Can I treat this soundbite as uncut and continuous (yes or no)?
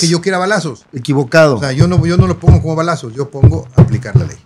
yes